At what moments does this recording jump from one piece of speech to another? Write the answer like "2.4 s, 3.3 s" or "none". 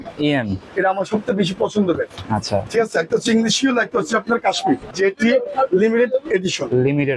2.6 s, 4.9 s